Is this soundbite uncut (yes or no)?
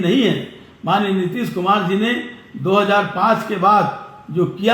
yes